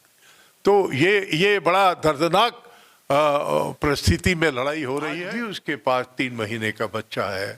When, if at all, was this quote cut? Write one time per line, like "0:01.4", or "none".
0:05.2

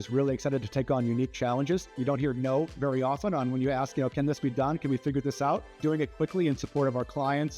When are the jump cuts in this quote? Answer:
0:01.9
0:05.7

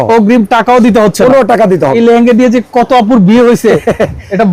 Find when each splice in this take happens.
0:02.0

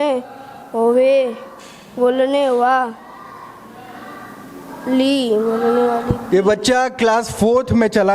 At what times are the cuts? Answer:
none

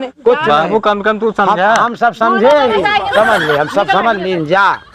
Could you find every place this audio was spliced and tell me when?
none

